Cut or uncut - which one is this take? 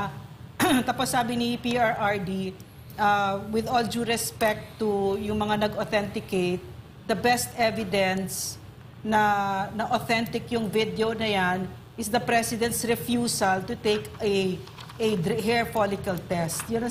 uncut